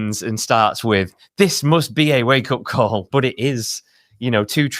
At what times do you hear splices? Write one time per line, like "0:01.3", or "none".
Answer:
0:03.1